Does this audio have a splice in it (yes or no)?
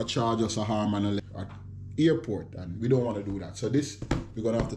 yes